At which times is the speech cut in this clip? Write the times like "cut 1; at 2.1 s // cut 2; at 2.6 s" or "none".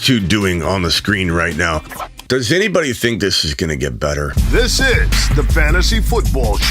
cut 1; at 2.0 s // cut 2; at 4.4 s